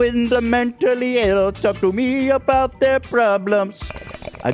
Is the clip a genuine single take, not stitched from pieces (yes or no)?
yes